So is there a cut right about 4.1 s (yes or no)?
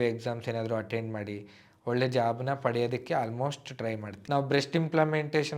yes